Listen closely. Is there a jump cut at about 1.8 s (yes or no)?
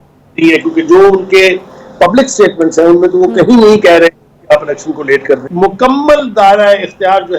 no